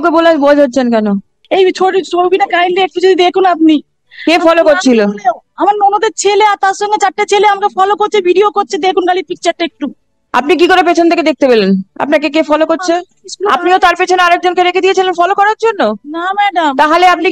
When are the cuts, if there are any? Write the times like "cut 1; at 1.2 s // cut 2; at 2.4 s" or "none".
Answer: cut 1; at 1.3 s